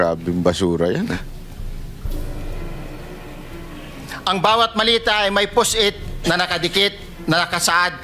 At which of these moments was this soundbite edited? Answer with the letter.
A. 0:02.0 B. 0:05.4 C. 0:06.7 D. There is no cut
D